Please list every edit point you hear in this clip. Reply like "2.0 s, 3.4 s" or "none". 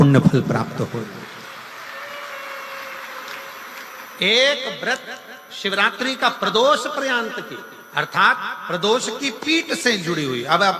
2.9 s

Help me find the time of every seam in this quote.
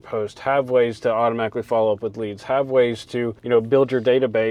none

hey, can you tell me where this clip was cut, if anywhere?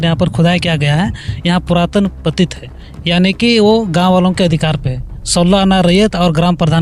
none

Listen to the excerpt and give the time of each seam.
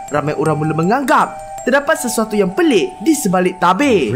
none

